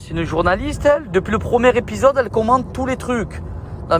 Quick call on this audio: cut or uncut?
cut